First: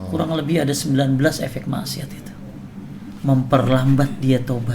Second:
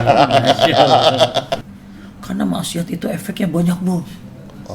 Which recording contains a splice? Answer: second; 1 cut; at 1.5 s

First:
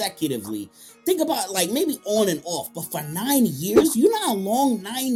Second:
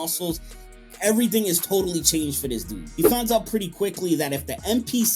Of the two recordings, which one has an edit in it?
second; 1 cut; at 2.9 s

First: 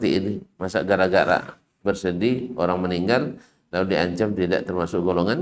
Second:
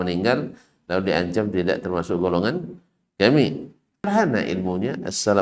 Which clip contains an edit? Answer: second; 1 cut; at 4.1 s

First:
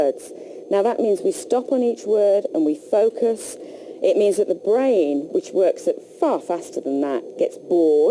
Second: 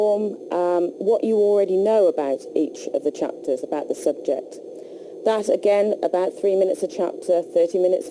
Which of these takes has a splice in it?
second; 1 cut; at 4.6 s

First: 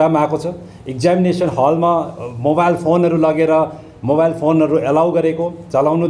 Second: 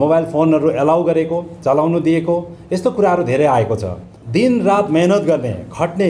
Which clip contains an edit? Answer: second; 1 cut; at 4.2 s

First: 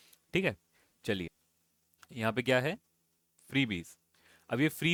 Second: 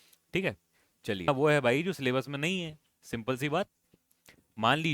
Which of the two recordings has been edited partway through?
second; 1 cut; at 1.3 s

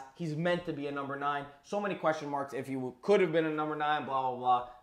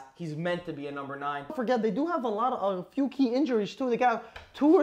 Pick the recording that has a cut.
second; 1 cut; at 1.5 s

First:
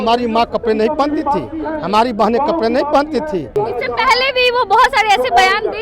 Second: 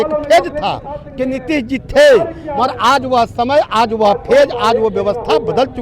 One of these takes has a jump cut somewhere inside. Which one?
first; 1 cut; at 3.5 s

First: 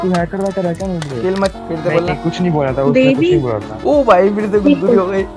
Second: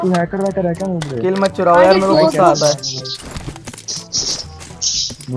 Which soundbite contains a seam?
first; 1 cut; at 1.6 s

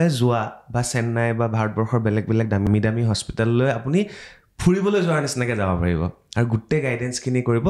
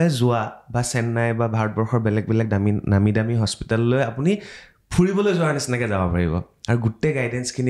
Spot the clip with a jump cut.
first; 1 cut; at 2.7 s

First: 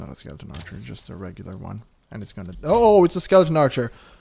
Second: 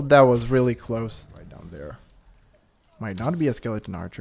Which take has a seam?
second; 1 cut; at 1.5 s

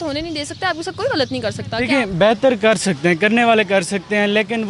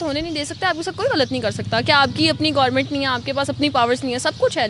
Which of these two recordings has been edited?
first; 1 cut; at 1.8 s

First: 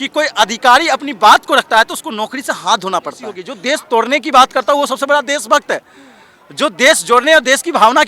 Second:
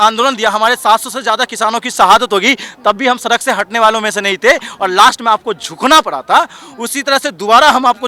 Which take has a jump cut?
first; 1 cut; at 3.5 s

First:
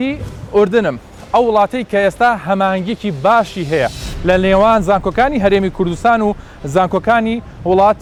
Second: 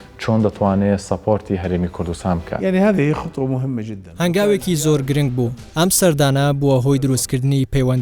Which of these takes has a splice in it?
second; 3 cuts; at 2.5 s, 4.0 s, 5.6 s

